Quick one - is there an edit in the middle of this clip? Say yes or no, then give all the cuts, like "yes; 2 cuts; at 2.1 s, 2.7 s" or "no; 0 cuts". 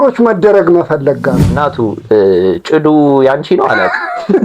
yes; 1 cut; at 1.4 s